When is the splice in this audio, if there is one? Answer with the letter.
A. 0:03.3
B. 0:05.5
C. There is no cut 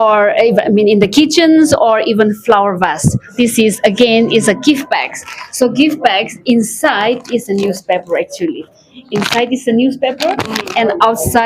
A